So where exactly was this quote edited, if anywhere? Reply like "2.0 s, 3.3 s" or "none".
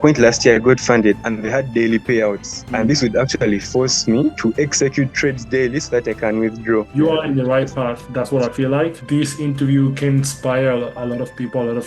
1.2 s, 6.9 s, 9.0 s